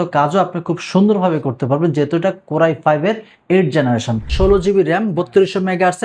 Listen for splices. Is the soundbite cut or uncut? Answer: cut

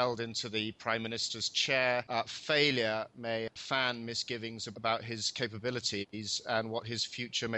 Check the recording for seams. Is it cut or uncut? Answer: cut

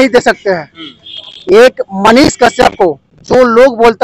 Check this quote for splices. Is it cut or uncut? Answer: uncut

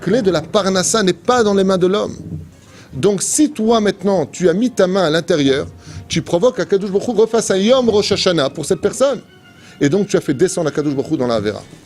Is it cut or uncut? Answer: uncut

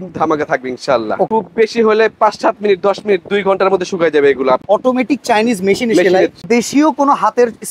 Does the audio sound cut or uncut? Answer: cut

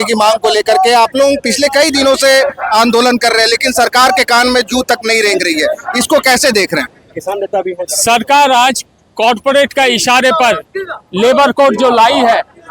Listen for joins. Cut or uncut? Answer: uncut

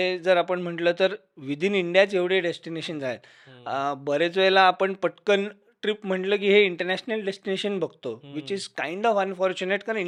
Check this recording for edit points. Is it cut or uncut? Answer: uncut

